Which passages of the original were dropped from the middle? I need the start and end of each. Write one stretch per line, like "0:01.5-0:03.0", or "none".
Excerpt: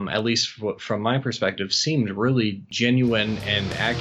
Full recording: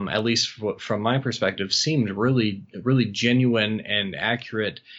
0:02.7-0:03.1